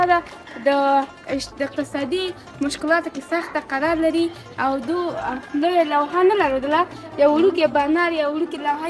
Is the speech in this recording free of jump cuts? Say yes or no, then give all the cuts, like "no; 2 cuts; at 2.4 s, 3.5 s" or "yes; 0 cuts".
yes; 0 cuts